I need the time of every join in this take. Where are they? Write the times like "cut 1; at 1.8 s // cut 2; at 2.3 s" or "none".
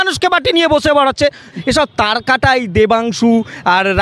cut 1; at 1.5 s